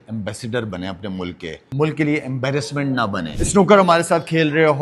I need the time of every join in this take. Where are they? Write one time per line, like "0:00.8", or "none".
0:01.6
0:03.3